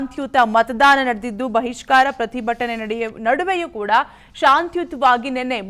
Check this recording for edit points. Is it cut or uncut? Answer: cut